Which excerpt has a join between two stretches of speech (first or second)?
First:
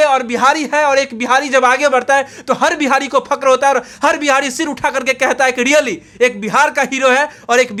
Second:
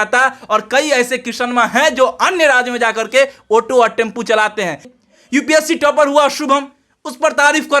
second